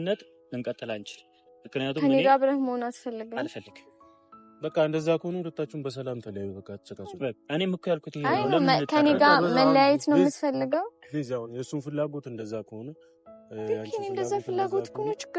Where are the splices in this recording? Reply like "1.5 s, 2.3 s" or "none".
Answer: none